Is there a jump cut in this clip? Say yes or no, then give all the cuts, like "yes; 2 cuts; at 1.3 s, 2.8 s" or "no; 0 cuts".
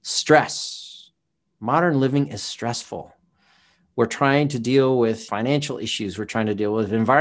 yes; 1 cut; at 5.2 s